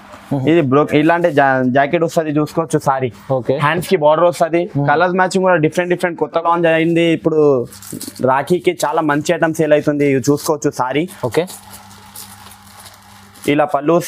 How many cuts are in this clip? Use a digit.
1